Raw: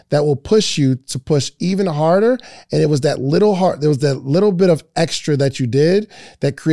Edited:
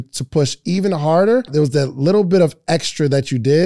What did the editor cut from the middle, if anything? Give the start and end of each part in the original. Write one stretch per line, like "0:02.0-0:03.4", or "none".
0:02.4-0:03.8